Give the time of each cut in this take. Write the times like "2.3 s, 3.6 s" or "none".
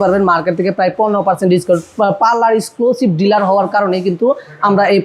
none